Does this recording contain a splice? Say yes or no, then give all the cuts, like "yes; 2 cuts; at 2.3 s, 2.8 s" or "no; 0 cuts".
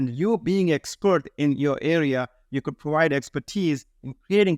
no; 0 cuts